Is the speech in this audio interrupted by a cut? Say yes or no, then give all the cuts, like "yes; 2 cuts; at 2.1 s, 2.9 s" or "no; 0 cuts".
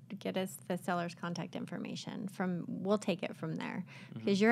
no; 0 cuts